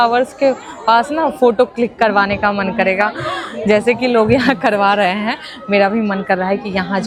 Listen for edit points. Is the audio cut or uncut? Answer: uncut